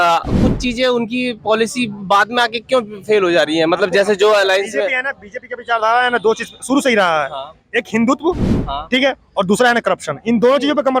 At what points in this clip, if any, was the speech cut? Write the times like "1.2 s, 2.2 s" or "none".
none